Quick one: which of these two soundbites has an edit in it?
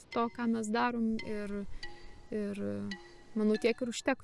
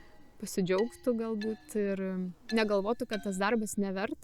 second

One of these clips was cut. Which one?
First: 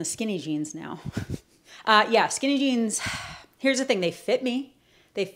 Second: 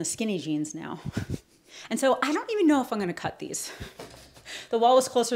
second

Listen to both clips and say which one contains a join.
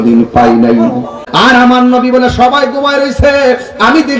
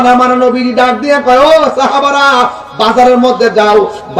first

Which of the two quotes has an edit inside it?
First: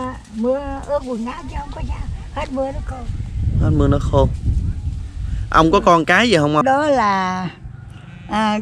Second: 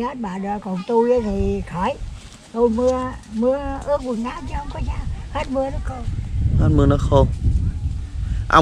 first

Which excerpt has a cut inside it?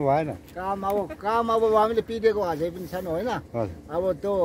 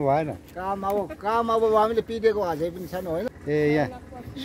second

